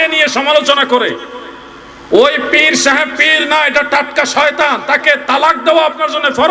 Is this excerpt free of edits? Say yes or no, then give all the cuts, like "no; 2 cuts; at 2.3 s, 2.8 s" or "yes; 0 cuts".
yes; 0 cuts